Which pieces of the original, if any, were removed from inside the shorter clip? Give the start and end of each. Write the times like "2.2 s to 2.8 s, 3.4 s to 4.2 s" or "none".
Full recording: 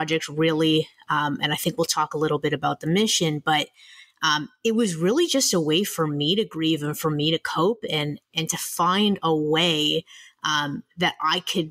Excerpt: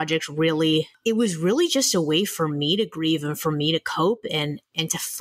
0.9 s to 4.5 s

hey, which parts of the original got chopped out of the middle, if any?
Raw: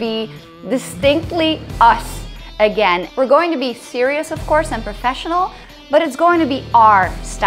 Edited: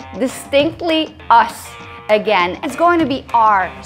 3.1 s to 6.0 s

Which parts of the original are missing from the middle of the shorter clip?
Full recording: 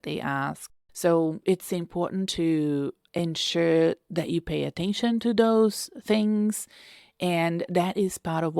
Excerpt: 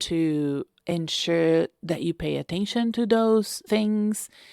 5.8 s to 5.9 s

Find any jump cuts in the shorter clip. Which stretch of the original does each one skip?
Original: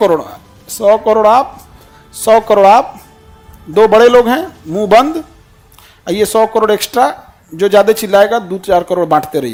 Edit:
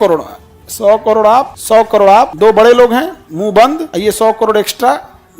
1.6 s to 2.1 s, 2.9 s to 3.7 s, 5.2 s to 6.0 s

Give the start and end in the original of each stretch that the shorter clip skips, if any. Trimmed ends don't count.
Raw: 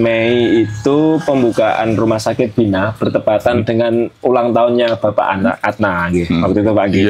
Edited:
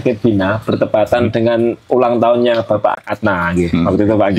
5.3 s to 5.6 s

